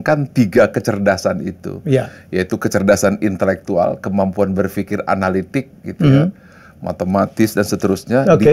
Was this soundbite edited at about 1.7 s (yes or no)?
no